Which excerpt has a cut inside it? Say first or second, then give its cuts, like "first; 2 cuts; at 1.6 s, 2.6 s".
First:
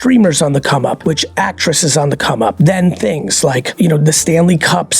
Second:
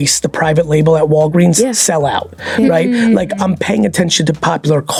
first; 3 cuts; at 1.0 s, 2.5 s, 3.7 s